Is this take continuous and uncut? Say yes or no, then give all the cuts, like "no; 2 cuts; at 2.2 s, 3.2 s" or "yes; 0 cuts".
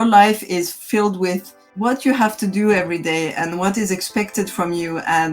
no; 1 cut; at 1.6 s